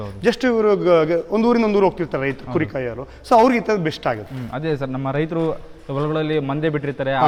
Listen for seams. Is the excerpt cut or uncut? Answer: uncut